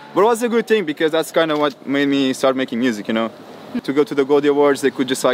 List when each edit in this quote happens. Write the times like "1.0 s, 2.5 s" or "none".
3.8 s